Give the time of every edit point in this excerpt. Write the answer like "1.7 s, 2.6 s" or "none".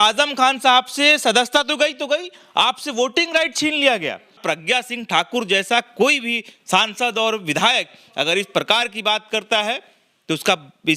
4.4 s